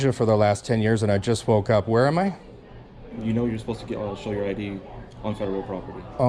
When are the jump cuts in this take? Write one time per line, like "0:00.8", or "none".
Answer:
none